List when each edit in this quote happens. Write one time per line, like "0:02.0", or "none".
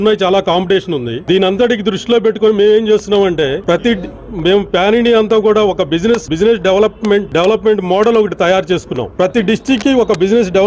0:01.1
0:03.6
0:06.3
0:07.3
0:09.0